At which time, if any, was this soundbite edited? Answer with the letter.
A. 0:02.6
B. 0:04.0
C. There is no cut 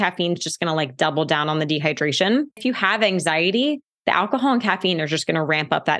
A